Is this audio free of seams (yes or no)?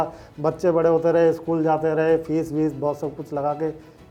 yes